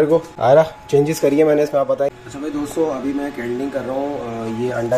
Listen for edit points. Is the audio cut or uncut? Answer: cut